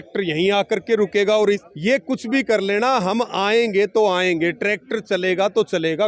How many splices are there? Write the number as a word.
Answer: one